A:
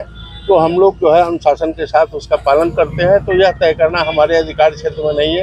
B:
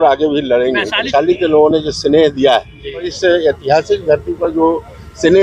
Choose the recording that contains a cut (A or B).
B